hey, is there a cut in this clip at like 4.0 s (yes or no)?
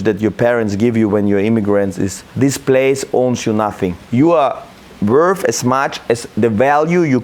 yes